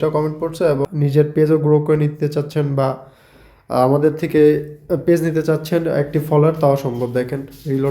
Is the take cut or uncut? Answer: cut